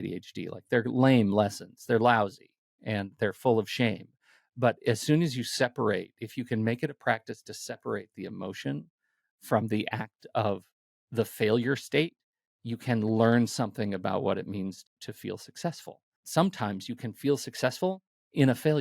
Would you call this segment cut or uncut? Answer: cut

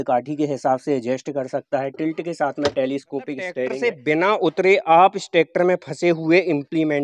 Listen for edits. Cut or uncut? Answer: cut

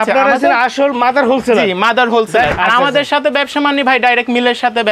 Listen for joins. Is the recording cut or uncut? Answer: cut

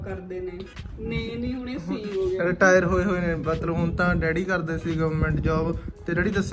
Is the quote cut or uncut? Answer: uncut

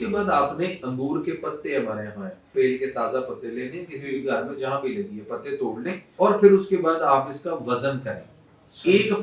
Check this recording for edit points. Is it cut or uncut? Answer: cut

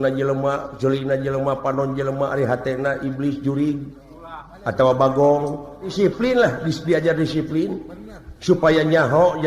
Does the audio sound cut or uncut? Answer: cut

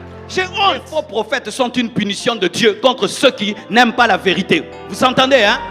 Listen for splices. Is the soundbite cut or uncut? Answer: cut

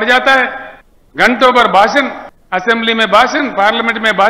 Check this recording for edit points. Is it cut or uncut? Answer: uncut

